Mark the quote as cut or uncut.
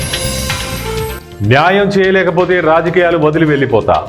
uncut